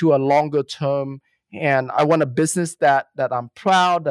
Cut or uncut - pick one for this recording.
cut